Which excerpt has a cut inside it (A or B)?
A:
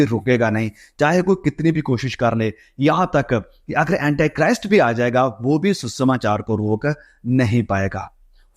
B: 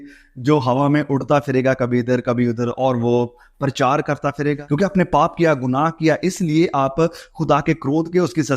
B